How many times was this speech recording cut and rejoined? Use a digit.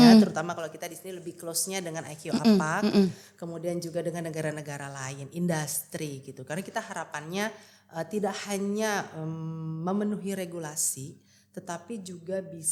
0